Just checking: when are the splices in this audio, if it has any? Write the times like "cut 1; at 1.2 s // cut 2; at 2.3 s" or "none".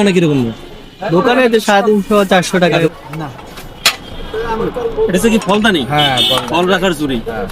cut 1; at 2.9 s // cut 2; at 5.4 s